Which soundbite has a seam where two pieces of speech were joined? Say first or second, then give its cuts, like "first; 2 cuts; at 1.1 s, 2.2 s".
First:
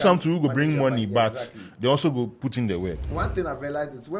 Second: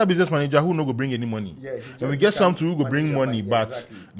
first; 1 cut; at 3.0 s